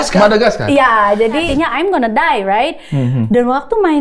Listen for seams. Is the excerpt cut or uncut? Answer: cut